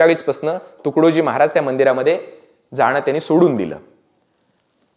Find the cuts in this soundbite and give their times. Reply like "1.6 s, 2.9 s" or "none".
none